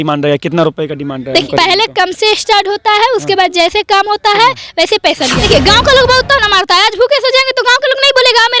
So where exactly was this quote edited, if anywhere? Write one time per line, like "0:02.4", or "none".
0:01.5
0:05.4

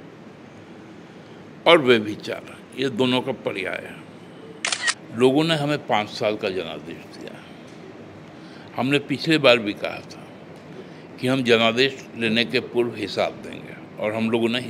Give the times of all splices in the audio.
0:04.9

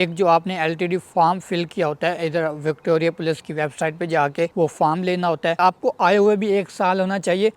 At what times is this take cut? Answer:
0:05.6

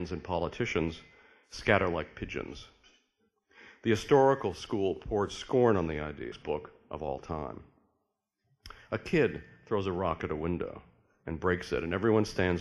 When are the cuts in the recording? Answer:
none

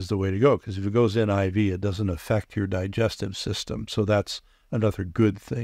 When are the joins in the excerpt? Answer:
none

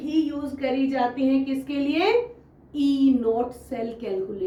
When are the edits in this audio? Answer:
none

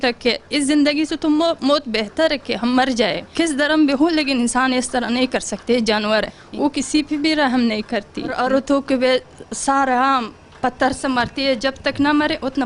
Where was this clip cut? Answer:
0:03.2
0:06.4
0:08.3

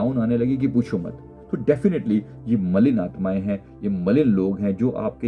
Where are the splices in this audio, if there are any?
none

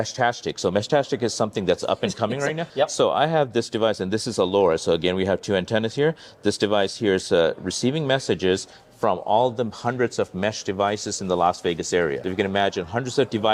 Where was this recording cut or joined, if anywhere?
0:02.7
0:12.2

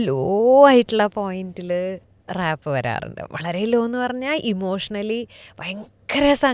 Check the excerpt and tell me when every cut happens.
0:02.1

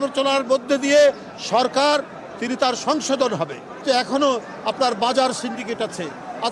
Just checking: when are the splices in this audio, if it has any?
0:03.7

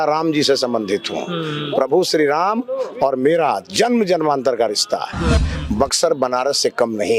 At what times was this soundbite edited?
0:05.4

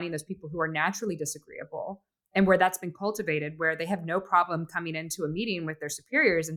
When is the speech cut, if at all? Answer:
none

